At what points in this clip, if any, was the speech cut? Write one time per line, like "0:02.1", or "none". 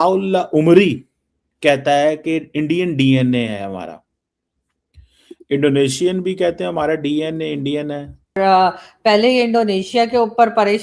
0:08.4